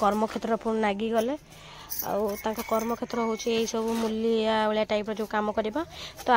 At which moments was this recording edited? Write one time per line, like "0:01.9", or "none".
none